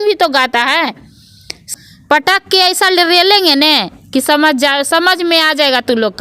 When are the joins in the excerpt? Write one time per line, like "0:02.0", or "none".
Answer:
0:01.7